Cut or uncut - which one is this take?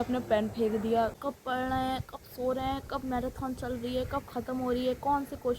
cut